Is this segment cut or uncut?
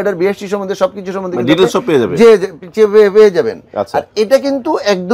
uncut